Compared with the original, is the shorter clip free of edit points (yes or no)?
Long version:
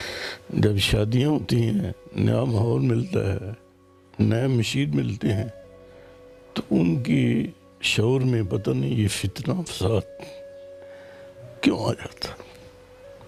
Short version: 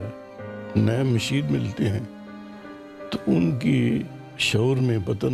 yes